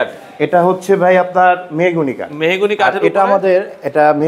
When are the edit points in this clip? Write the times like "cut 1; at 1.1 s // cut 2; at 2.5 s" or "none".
none